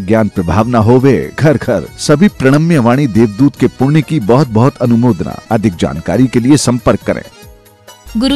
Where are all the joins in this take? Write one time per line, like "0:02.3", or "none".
none